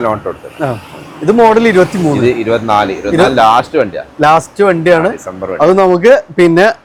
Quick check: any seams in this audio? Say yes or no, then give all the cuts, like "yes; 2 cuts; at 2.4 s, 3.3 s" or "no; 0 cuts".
no; 0 cuts